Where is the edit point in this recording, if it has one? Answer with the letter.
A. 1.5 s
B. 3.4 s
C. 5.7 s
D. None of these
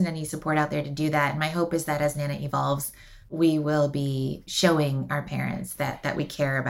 D